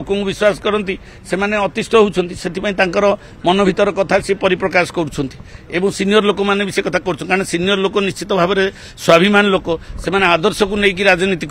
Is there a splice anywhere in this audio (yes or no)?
no